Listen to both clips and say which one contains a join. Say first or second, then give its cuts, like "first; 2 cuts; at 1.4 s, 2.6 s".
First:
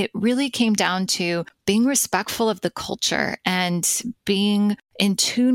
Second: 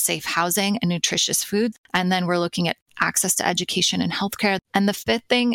second; 2 cuts; at 1.7 s, 4.6 s